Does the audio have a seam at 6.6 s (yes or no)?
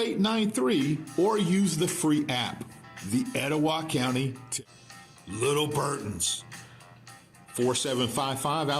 no